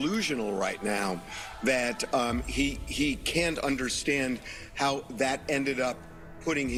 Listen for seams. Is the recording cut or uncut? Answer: uncut